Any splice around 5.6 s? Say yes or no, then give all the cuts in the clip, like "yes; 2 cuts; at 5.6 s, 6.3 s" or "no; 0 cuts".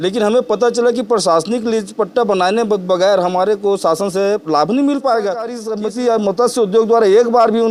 yes; 1 cut; at 5.6 s